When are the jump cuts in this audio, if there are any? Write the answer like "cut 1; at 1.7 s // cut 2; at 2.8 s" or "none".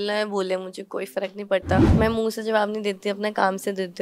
none